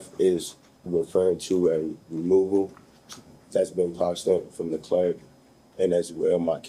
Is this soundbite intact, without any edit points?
yes; 0 cuts

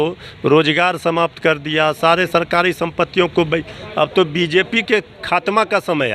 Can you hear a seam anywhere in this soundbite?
no; 0 cuts

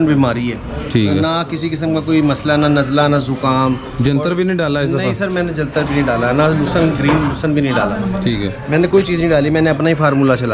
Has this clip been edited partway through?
no; 0 cuts

